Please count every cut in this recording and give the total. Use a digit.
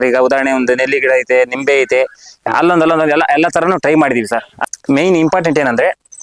1